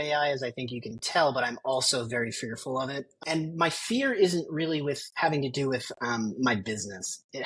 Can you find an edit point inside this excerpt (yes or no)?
no